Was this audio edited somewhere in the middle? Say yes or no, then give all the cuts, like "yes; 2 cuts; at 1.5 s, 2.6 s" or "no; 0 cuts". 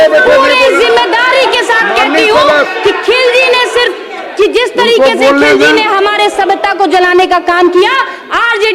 no; 0 cuts